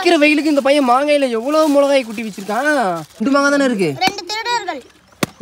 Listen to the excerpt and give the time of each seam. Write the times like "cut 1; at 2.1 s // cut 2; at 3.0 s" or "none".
cut 1; at 3.2 s

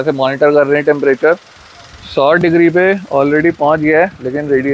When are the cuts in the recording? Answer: none

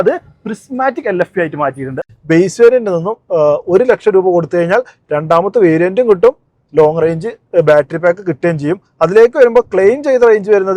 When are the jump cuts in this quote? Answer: cut 1; at 2.1 s

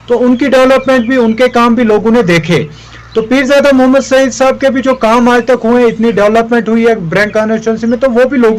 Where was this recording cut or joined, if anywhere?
none

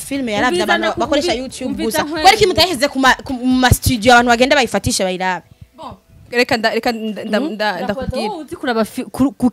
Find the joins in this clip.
none

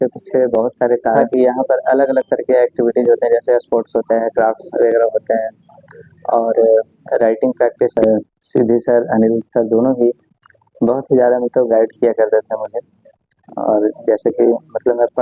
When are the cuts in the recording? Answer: cut 1; at 1.2 s // cut 2; at 8.0 s

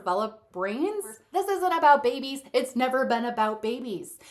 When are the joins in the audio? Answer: cut 1; at 1.2 s

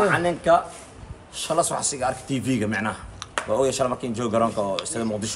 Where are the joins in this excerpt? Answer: none

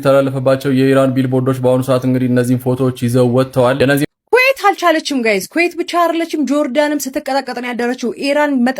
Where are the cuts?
cut 1; at 4.1 s

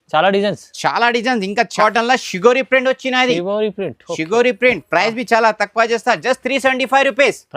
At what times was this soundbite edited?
cut 1; at 1.7 s

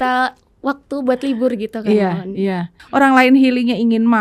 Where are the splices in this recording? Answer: cut 1; at 2.7 s

